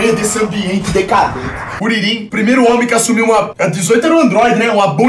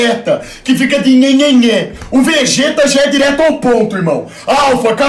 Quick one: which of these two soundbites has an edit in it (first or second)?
first